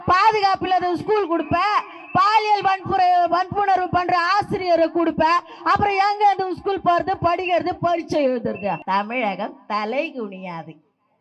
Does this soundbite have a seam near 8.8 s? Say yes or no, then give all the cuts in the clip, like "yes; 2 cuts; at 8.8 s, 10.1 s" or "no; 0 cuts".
yes; 1 cut; at 8.8 s